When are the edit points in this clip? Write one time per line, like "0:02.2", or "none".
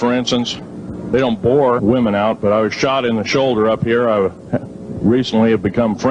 none